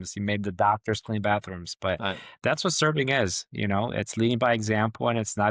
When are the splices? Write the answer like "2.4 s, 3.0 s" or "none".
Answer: none